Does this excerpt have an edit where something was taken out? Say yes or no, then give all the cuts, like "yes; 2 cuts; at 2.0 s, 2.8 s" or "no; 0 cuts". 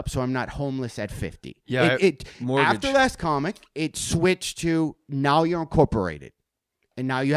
no; 0 cuts